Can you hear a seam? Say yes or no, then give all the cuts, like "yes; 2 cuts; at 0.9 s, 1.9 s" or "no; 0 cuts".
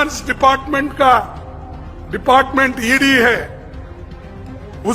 no; 0 cuts